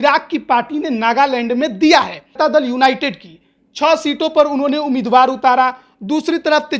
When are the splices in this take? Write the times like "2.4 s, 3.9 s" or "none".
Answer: 2.3 s